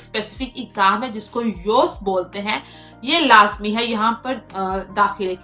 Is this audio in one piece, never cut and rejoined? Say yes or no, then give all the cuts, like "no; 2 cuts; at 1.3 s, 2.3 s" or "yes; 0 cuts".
yes; 0 cuts